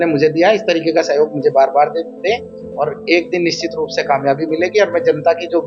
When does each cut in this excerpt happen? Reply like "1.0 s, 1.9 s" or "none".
none